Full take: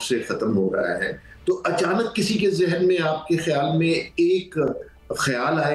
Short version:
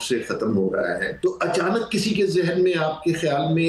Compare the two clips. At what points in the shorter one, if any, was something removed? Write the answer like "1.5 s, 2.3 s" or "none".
1.1 s

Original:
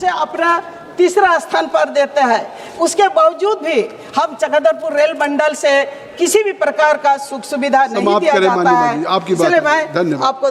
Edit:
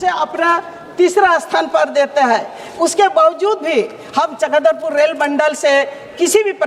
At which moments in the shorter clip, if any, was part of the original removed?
none

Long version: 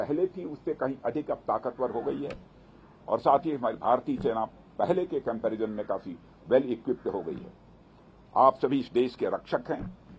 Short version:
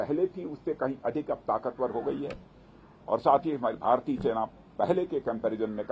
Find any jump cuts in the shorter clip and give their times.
none

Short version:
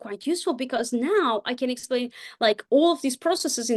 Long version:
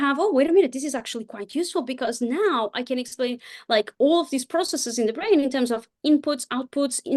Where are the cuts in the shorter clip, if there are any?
none

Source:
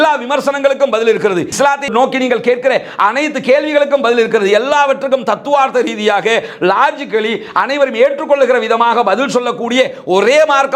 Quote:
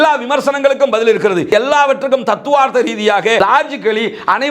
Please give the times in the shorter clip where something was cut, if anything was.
1.5 s, 3.4 s

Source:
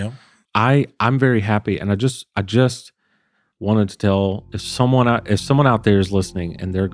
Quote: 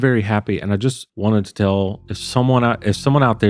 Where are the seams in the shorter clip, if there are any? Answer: 1.1 s

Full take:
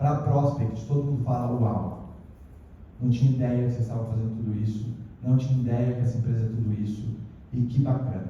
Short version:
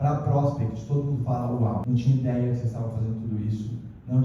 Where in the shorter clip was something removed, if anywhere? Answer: 1.8 s

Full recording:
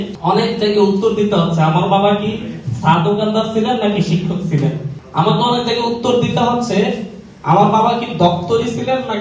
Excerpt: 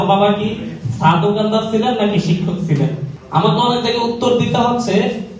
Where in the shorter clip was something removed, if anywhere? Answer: none

